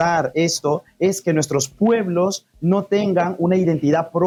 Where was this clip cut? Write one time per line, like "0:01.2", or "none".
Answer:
none